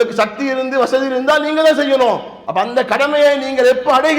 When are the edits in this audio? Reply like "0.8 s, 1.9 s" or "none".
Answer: 2.3 s